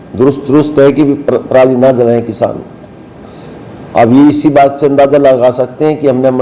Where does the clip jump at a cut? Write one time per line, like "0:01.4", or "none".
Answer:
none